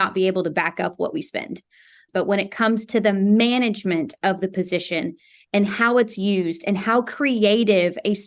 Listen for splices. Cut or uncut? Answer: cut